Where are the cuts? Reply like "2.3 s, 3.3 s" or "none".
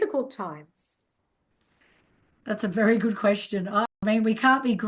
3.9 s